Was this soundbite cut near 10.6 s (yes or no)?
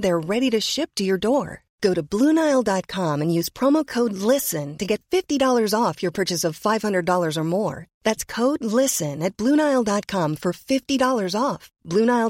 no